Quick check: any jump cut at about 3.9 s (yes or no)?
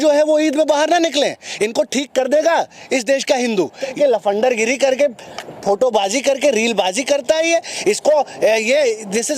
yes